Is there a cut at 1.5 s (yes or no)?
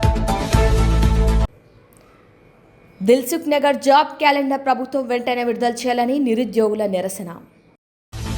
yes